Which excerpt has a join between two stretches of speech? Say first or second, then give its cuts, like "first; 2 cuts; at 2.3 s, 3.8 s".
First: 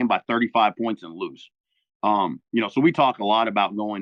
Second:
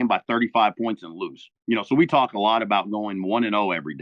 second; 1 cut; at 1.5 s